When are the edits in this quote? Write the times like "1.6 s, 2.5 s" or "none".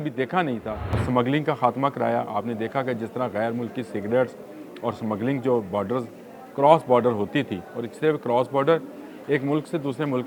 1.0 s

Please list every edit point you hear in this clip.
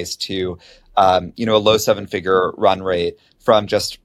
none

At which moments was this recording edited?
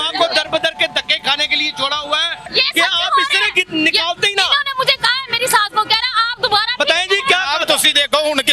2.4 s

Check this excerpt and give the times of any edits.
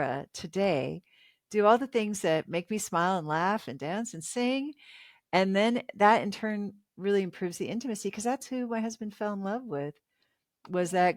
none

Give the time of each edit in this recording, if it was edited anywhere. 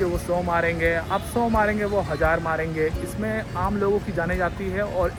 none

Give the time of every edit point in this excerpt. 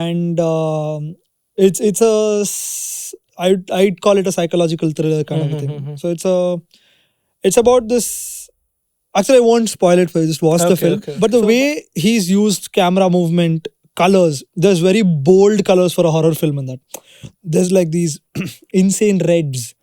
11.1 s

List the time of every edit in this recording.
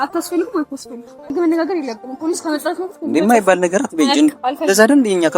1.2 s

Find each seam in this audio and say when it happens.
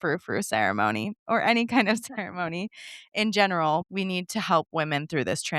3.9 s

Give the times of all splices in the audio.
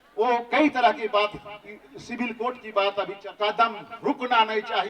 3.2 s

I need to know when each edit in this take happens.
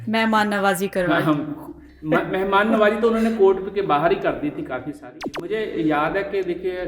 5.5 s

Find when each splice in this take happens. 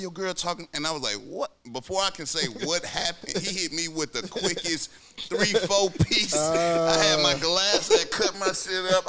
none

